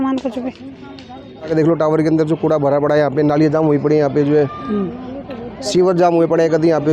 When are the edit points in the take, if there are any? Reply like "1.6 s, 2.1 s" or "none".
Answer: 1.5 s